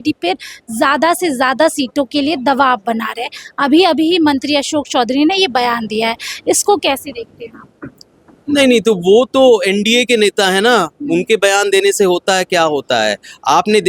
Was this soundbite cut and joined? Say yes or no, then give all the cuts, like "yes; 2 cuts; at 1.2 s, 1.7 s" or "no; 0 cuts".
no; 0 cuts